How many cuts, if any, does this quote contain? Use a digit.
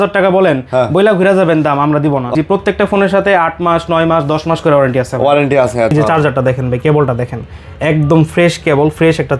2